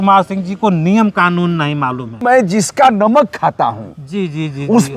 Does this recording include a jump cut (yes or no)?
yes